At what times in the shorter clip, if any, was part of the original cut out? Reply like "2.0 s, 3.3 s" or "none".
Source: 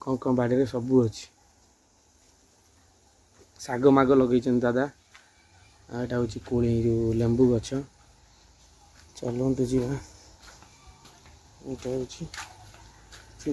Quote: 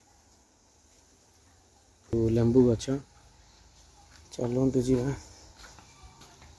2.1 s